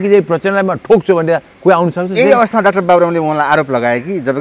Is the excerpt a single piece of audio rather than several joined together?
yes; 0 cuts

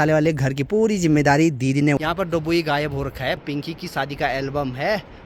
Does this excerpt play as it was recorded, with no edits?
no; 2 cuts; at 2.0 s, 3.4 s

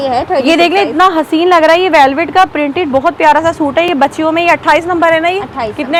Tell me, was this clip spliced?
no; 0 cuts

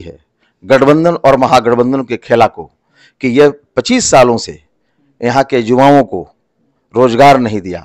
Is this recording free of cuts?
yes; 0 cuts

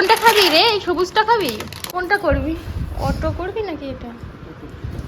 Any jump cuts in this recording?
yes; 1 cut; at 1.7 s

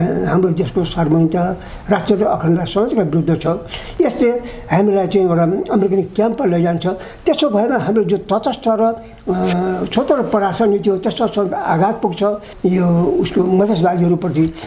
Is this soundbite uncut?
no; 1 cut; at 12.5 s

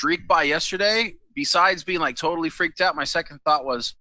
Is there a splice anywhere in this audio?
no; 0 cuts

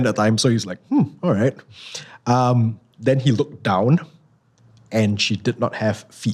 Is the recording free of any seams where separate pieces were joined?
yes; 0 cuts

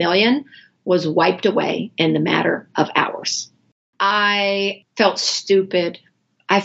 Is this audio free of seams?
no; 2 cuts; at 3.9 s, 4.8 s

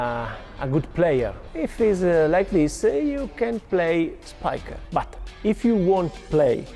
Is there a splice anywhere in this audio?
yes; 3 cuts; at 1.4 s, 3.6 s, 4.5 s

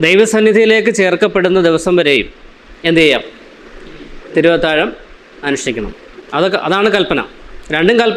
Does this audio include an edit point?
no; 0 cuts

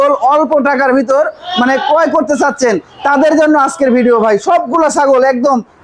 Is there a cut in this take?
no; 0 cuts

